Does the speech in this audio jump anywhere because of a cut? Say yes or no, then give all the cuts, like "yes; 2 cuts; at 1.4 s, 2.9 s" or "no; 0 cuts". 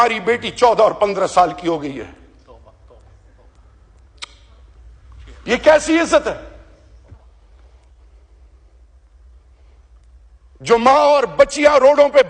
no; 0 cuts